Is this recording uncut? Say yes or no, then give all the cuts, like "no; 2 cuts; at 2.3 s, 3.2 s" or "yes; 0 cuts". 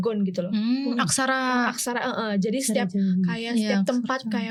yes; 0 cuts